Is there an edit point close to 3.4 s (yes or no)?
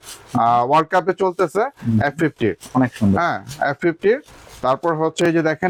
no